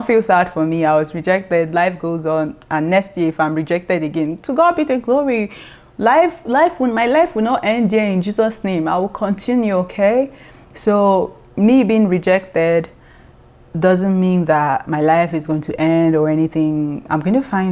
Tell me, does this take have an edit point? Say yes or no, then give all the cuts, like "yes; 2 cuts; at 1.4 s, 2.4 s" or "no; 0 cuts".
no; 0 cuts